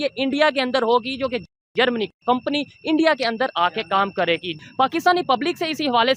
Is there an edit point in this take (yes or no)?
no